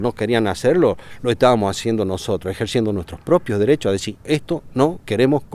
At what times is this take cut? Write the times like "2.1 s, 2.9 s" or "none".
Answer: none